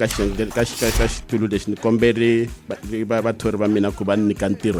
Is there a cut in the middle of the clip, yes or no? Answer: no